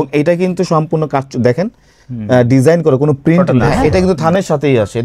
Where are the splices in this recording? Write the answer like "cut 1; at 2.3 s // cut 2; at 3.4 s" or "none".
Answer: cut 1; at 3.6 s